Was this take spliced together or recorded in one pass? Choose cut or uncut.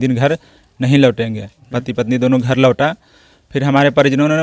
cut